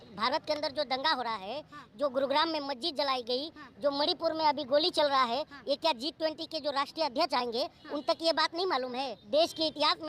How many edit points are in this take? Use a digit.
1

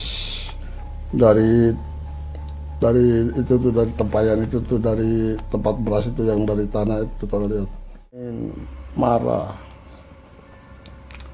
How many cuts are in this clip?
1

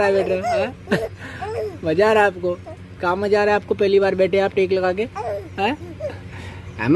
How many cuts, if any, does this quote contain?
0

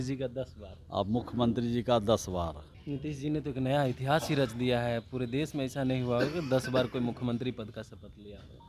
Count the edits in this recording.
1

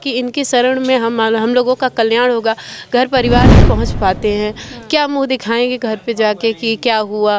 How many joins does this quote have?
1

